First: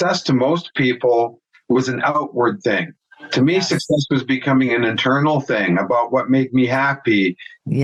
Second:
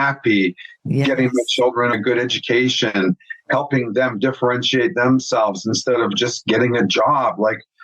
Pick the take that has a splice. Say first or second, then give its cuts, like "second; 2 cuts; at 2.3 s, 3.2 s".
second; 2 cuts; at 1.9 s, 6.1 s